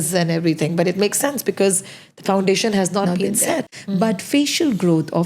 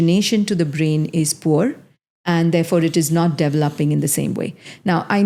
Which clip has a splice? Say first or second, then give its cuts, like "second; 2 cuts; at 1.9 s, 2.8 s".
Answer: first; 1 cut; at 3.7 s